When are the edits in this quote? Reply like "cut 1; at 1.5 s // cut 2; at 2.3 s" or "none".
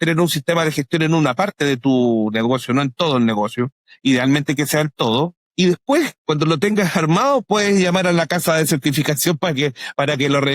cut 1; at 5.4 s // cut 2; at 6.2 s